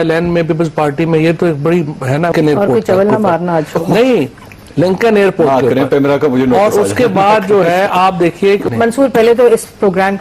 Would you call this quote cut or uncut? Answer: cut